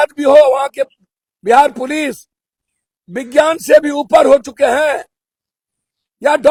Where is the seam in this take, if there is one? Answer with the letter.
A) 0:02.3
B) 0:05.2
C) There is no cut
C